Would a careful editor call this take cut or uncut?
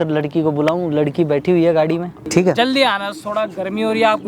cut